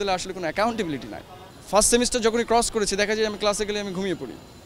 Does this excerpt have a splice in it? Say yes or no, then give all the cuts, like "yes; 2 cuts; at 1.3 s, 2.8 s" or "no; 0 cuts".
no; 0 cuts